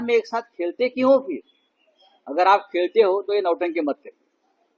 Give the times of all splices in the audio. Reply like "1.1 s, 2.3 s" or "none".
none